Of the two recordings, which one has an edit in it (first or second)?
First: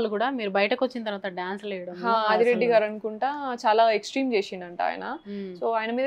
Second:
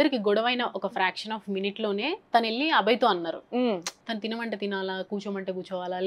second